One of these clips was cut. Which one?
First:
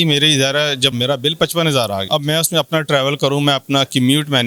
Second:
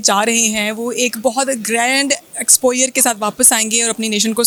first; 2 cuts; at 1.0 s, 2.0 s

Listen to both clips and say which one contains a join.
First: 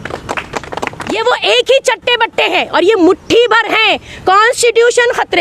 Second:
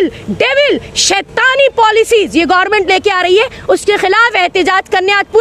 first; 2 cuts; at 1.2 s, 4.1 s

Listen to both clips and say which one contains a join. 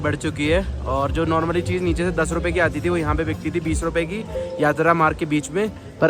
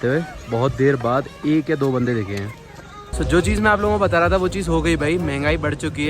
second; 1 cut; at 3.1 s

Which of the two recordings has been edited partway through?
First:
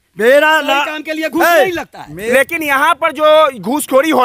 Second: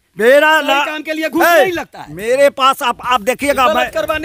first; 1 cut; at 2.3 s

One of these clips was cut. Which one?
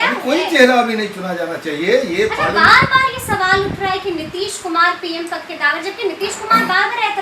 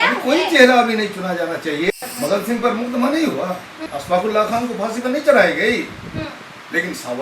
second; 2 cuts; at 1.9 s, 3.9 s

